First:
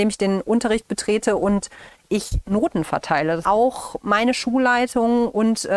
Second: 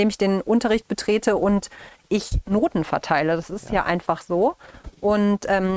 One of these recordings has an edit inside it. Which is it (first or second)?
first